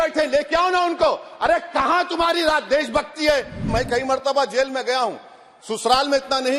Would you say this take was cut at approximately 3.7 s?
yes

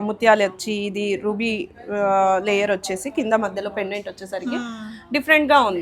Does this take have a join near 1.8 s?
no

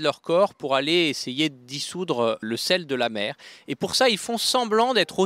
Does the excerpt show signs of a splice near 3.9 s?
no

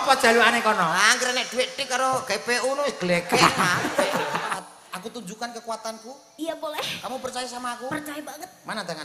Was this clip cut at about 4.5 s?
yes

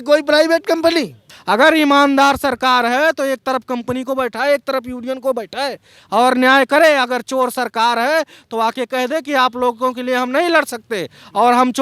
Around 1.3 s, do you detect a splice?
yes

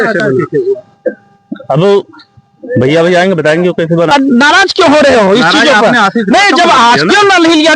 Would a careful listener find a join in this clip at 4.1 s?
yes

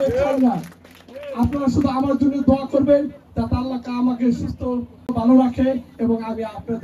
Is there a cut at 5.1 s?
yes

